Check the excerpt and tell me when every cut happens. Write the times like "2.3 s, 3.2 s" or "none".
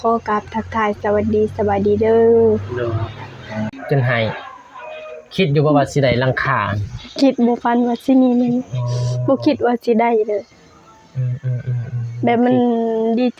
3.8 s